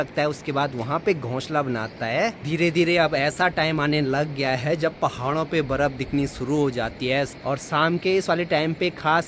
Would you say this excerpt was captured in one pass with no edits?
no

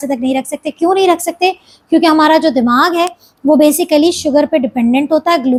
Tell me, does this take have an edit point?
no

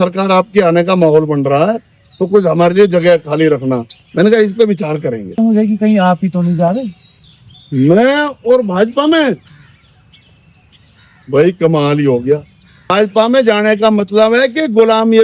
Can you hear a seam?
yes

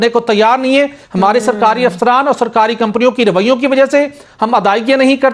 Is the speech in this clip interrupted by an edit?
no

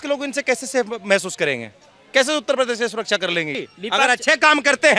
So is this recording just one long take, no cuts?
no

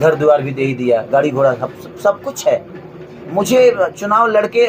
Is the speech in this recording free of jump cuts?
yes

